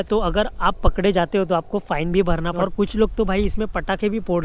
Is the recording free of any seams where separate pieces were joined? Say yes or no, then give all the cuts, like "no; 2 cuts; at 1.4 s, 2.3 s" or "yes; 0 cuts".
no; 1 cut; at 2.5 s